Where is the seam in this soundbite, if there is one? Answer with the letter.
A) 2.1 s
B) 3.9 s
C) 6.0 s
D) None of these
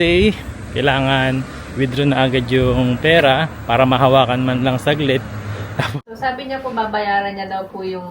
C